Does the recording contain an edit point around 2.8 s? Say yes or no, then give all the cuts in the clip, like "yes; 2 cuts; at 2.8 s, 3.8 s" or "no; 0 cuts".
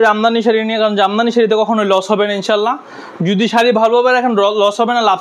no; 0 cuts